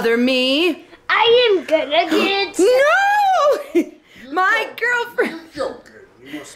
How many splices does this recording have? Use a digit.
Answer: 0